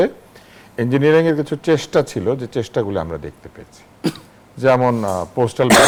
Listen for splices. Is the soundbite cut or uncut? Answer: uncut